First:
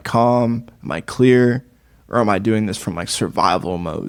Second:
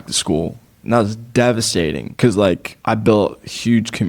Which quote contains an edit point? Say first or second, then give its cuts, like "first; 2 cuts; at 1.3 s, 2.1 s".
second; 2 cuts; at 2.1 s, 2.7 s